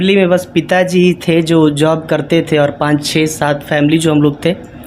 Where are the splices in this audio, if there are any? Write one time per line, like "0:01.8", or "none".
none